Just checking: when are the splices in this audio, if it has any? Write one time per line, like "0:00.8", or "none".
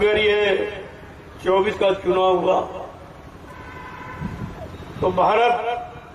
0:01.7